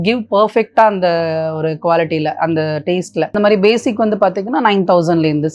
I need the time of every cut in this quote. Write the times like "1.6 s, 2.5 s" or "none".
3.3 s